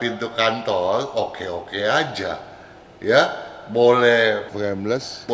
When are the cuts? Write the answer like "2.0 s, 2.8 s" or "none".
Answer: none